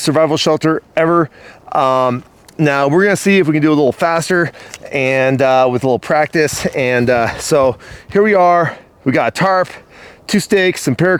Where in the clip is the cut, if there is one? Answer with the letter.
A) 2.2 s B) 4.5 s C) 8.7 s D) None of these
D